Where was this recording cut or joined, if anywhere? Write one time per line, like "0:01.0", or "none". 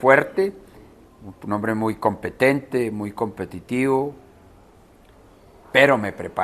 none